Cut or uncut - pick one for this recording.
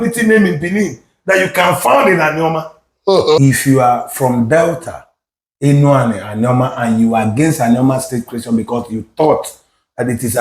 cut